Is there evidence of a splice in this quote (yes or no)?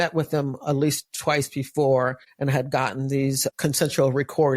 yes